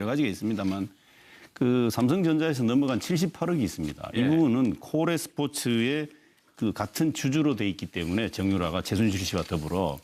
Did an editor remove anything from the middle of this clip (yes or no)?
yes